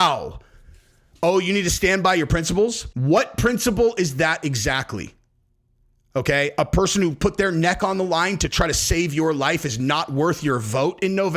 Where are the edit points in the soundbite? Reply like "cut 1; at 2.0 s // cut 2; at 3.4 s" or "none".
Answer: cut 1; at 2.9 s